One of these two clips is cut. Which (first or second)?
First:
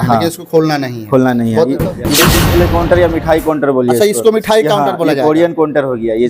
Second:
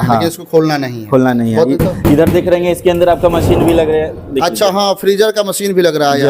first